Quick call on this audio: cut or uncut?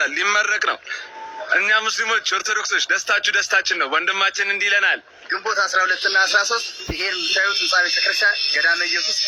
uncut